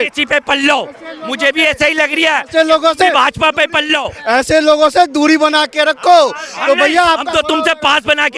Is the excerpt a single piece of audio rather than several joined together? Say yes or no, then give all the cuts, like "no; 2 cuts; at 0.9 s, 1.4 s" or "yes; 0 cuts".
yes; 0 cuts